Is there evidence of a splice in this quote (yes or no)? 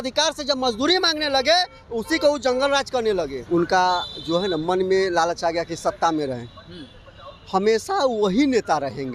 yes